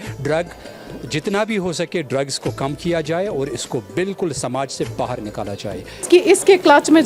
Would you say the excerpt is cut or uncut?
cut